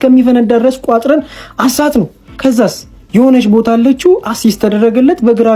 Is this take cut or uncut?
cut